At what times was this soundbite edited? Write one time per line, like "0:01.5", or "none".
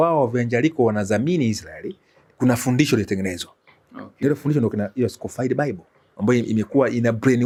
none